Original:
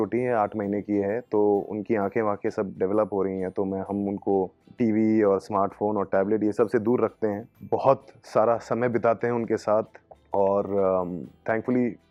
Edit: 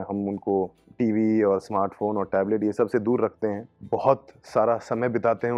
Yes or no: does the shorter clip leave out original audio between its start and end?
no